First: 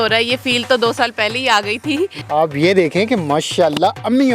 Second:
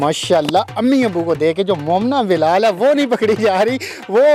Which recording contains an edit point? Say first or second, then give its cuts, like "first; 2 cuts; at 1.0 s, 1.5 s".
first; 1 cut; at 2.2 s